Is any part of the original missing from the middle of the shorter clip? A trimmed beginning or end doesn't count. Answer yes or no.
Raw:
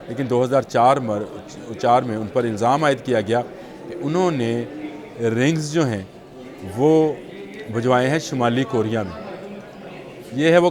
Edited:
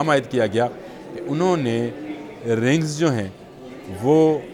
no